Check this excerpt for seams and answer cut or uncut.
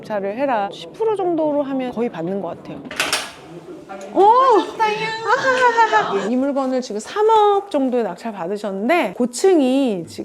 cut